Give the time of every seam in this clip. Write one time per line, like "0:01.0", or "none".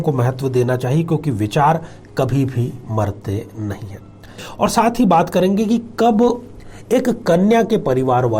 0:04.4